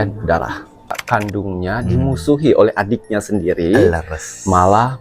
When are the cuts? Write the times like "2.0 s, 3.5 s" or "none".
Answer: 1.0 s